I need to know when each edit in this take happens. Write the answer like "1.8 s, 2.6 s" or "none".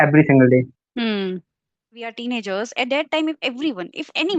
2.2 s